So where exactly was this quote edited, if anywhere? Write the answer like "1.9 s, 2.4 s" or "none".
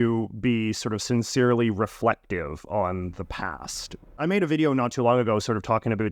4.0 s